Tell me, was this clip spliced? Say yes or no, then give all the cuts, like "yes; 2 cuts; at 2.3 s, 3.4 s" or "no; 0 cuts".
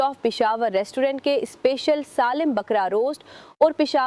no; 0 cuts